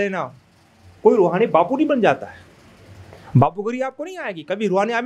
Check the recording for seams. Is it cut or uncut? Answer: uncut